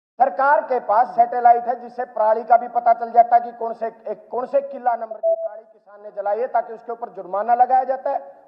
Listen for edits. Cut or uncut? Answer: uncut